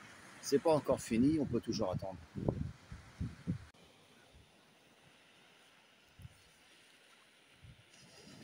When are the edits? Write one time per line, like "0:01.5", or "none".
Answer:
0:03.8